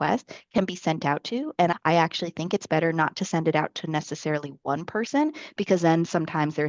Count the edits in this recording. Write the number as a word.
one